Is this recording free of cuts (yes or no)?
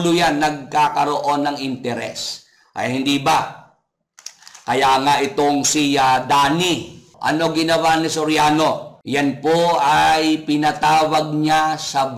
no